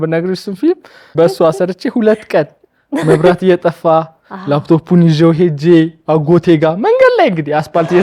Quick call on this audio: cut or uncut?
cut